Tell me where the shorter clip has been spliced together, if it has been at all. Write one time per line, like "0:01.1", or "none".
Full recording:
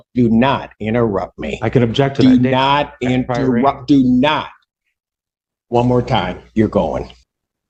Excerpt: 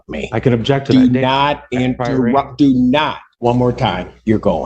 0:03.3

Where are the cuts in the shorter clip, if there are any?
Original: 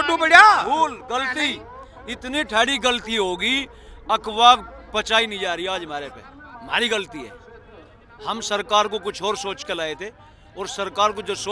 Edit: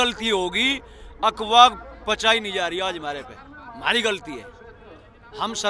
none

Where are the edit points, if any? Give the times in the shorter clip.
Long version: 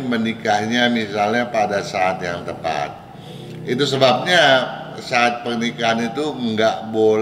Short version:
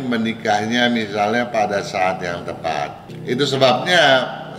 0:03.1

